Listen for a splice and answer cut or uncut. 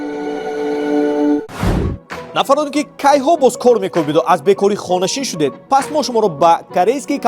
cut